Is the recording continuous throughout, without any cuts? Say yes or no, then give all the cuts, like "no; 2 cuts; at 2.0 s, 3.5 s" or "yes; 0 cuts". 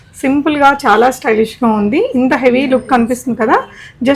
yes; 0 cuts